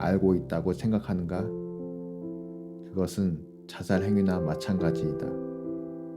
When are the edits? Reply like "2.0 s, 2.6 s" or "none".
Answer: 5.2 s